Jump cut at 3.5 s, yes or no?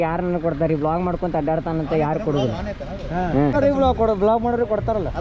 yes